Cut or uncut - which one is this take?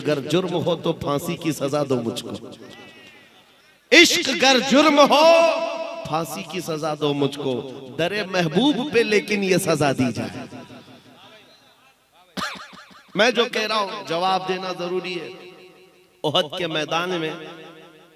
uncut